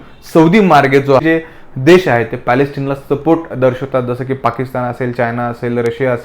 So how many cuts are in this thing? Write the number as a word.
one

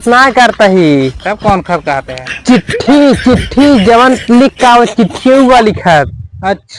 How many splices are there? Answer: zero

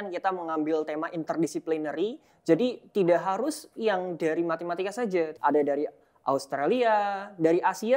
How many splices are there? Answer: one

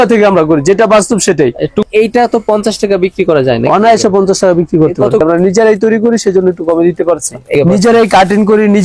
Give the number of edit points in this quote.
three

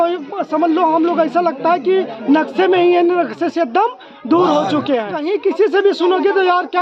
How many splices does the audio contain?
one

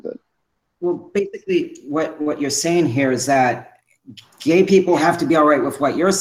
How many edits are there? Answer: one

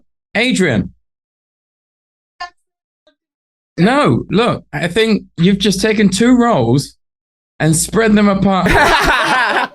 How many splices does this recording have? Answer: one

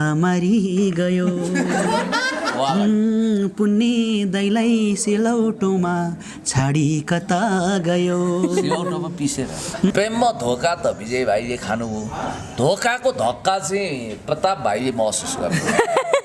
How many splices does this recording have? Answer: one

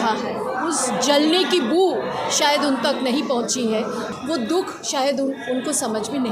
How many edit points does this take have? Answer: one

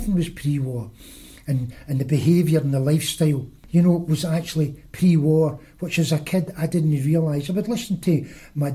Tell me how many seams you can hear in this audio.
one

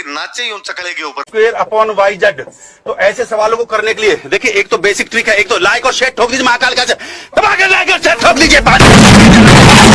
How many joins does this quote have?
one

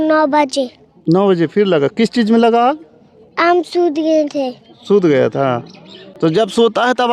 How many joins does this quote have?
zero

